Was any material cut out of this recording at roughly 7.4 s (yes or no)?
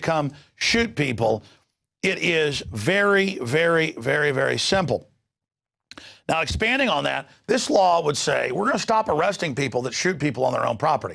no